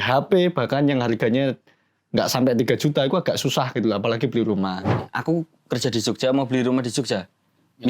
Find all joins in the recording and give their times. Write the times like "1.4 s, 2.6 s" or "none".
5.1 s